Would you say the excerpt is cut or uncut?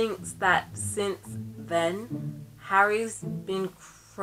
uncut